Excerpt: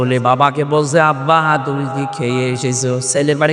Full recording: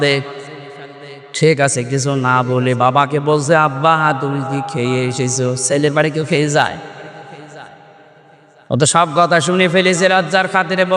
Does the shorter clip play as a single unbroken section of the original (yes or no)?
yes